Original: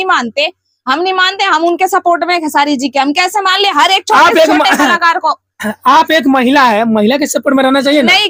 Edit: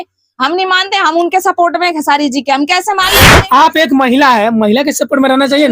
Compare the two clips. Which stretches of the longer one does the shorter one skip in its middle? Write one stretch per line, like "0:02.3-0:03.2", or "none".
0:03.6-0:05.5